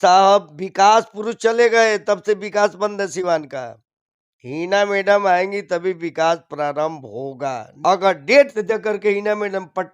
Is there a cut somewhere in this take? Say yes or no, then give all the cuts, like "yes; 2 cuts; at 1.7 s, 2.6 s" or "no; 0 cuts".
yes; 1 cut; at 7.7 s